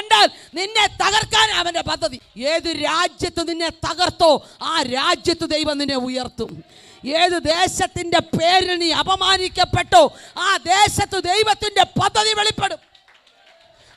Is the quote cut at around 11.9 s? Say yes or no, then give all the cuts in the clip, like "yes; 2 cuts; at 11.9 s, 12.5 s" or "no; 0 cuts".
no; 1 cut; at 2.3 s